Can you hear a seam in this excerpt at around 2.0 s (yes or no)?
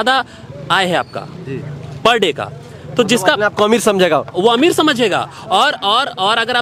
no